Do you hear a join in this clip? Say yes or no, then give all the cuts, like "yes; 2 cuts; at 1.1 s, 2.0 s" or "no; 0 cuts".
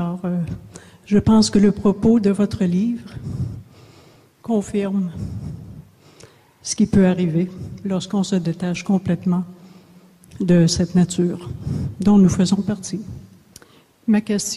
yes; 1 cut; at 7.0 s